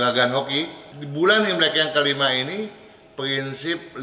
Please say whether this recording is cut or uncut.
uncut